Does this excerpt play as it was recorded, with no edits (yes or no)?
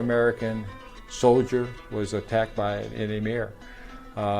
yes